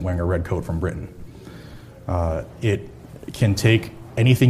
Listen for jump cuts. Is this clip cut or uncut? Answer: uncut